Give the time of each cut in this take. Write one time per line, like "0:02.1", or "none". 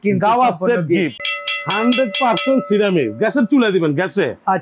0:01.2

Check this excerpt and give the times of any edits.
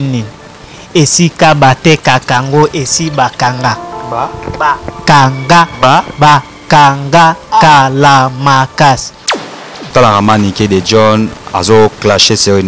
0:09.3

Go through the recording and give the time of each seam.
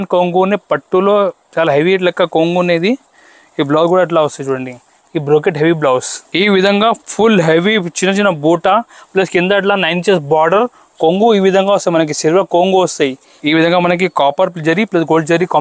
0:06.2
0:13.3

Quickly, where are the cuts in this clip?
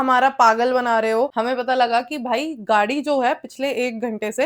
0:01.3

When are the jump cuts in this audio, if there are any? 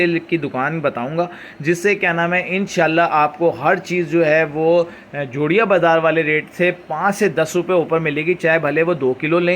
none

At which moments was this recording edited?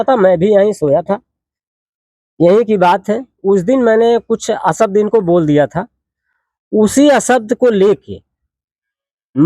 none

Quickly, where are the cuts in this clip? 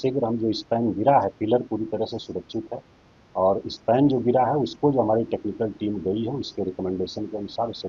none

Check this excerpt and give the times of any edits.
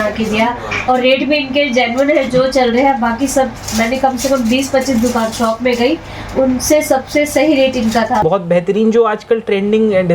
0:08.2

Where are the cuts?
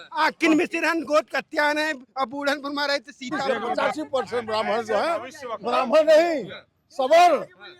0:03.4

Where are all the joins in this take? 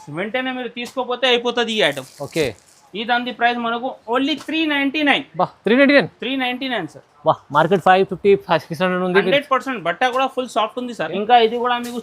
0:11.1

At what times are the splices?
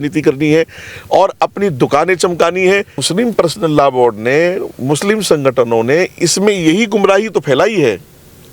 0:03.0

